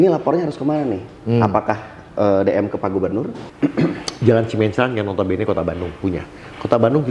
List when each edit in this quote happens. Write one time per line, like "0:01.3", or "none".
0:03.4

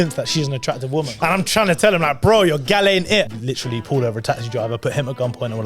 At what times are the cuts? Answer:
0:01.1
0:03.3

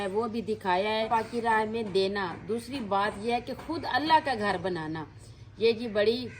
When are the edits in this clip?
0:01.1

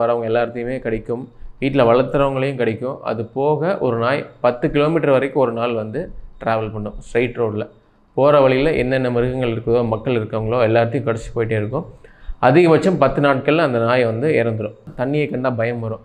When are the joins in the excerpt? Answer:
0:14.8

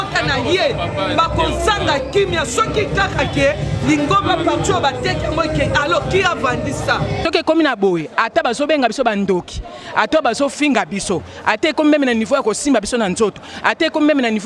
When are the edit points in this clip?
0:07.2

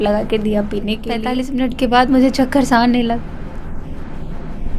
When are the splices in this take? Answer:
0:01.3

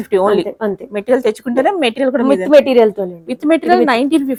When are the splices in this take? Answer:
none

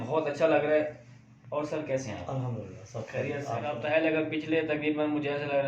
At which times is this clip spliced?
0:03.8

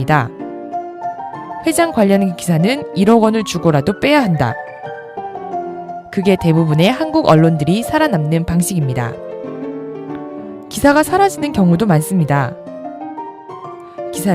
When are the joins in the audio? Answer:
none

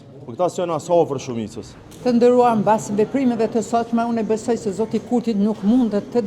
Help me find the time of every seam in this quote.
none

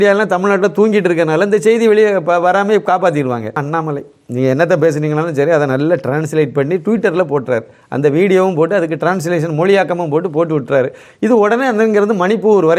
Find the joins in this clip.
0:03.6

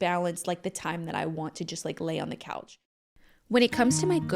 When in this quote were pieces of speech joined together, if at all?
0:02.9

